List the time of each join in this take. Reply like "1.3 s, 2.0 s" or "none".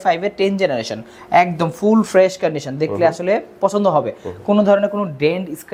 none